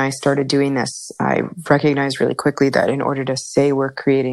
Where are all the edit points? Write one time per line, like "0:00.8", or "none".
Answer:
none